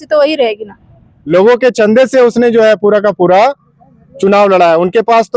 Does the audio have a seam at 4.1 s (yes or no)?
no